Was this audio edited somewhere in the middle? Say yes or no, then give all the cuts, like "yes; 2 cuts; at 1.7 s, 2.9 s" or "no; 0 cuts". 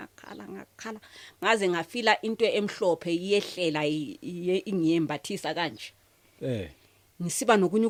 no; 0 cuts